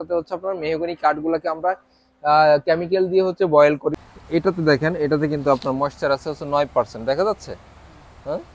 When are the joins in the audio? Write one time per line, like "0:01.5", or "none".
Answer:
0:04.1